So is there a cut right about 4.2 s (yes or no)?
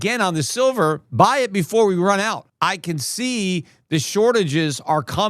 no